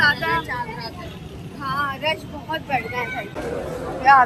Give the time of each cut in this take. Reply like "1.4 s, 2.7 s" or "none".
3.3 s